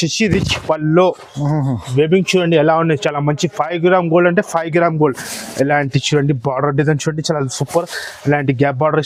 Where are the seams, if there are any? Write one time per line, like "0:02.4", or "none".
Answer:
none